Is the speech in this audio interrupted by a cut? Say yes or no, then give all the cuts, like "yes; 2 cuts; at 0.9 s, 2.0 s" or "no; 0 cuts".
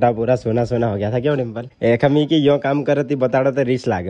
yes; 1 cut; at 1.6 s